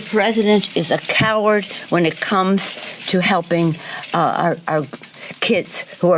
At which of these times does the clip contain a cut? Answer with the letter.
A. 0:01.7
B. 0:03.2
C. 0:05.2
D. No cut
A